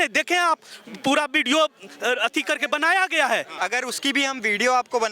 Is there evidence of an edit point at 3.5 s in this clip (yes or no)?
yes